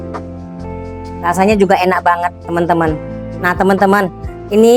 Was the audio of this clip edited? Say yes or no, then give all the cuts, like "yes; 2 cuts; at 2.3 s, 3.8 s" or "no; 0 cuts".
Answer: no; 0 cuts